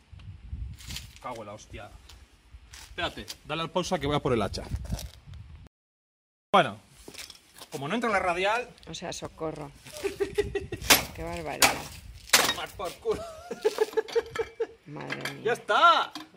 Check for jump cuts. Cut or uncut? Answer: uncut